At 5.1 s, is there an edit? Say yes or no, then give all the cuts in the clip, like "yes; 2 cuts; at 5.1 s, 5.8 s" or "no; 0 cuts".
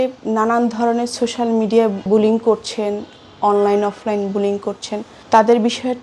yes; 2 cuts; at 2.1 s, 5.1 s